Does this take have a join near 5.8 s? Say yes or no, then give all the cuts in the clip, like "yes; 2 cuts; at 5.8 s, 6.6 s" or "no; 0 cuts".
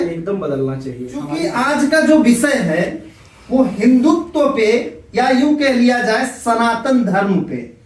no; 1 cut; at 1.5 s